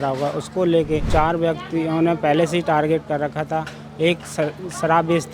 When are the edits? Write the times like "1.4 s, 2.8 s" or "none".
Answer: 1.1 s